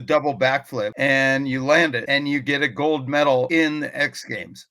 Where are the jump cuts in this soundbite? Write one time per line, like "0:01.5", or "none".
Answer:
0:00.9
0:02.0
0:03.5

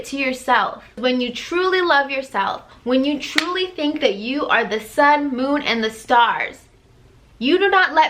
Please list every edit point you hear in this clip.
0:01.0

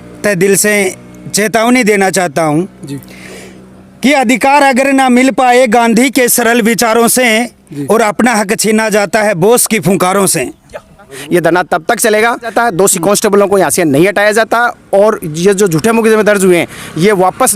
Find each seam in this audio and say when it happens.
0:11.1
0:12.5

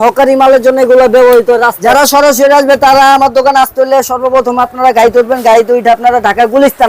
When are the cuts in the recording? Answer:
0:01.8

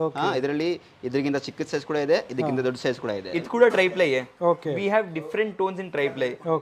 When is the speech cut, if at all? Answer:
0:03.2

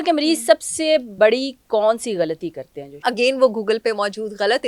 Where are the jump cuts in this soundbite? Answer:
0:01.1
0:03.0

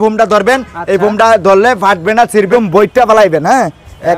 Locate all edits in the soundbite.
0:02.5

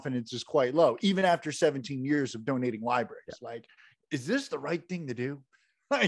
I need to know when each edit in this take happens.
none

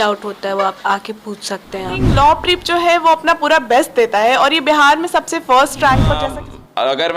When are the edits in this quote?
0:02.0
0:06.3

